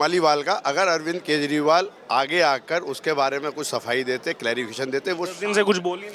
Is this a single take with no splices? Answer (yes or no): yes